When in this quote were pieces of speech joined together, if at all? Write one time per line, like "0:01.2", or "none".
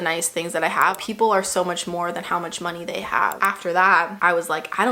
0:01.0
0:03.4